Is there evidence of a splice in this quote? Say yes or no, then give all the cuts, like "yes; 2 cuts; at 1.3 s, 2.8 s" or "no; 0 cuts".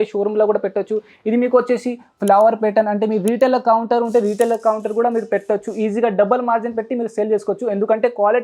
no; 0 cuts